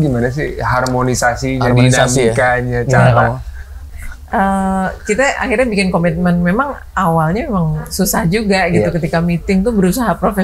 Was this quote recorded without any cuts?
yes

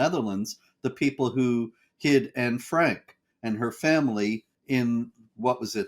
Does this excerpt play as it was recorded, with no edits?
no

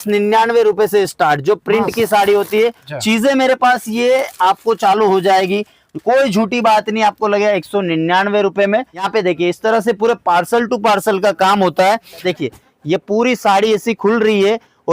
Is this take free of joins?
no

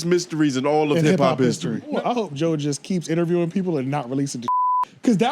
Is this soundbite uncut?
no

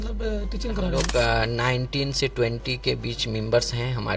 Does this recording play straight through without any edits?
no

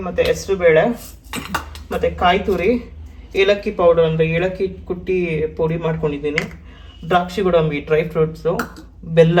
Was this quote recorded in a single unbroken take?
yes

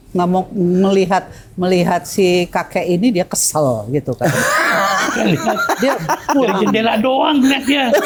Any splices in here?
no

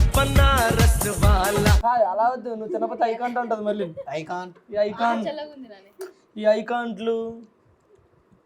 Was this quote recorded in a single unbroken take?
no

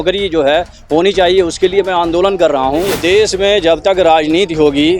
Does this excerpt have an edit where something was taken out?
yes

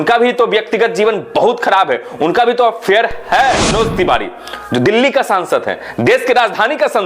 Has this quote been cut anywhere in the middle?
yes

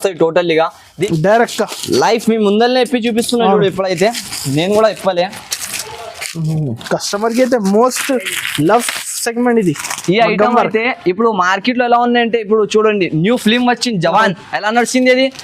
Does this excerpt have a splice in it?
yes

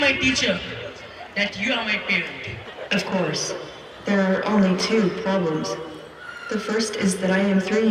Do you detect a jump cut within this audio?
yes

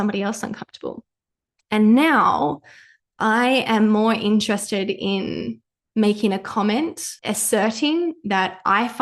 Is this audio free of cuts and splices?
no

